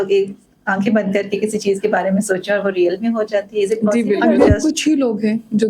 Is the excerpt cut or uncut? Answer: cut